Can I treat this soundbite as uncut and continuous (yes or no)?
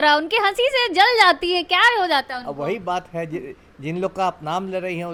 yes